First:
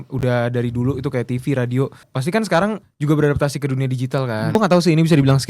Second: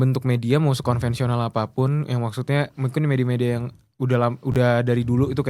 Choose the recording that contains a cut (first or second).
first